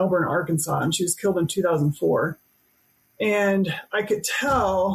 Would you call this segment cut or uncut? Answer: uncut